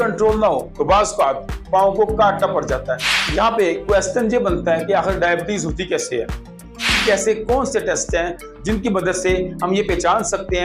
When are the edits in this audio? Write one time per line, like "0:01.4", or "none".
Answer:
0:03.1
0:06.9